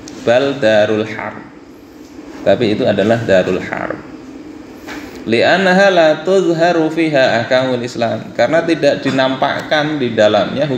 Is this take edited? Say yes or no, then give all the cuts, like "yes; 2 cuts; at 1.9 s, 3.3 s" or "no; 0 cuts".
no; 0 cuts